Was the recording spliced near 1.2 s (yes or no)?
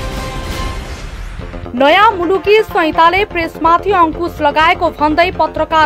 no